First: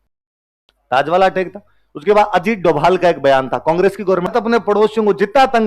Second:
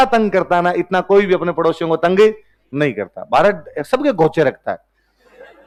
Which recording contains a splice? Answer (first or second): first